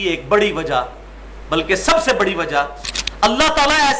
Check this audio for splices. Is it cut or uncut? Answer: cut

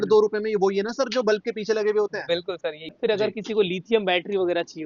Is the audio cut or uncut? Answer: uncut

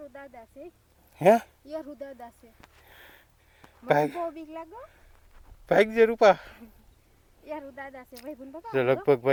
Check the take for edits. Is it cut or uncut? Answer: uncut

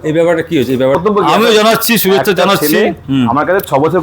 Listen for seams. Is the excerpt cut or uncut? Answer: cut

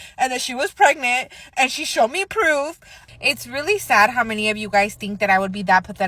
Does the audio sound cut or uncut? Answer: cut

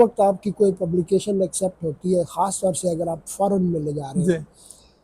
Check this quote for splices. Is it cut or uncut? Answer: uncut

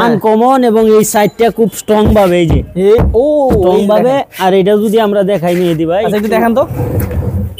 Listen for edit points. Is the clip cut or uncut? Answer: uncut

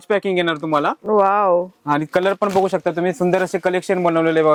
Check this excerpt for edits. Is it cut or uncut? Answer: uncut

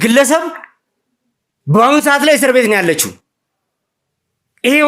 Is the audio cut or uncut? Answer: uncut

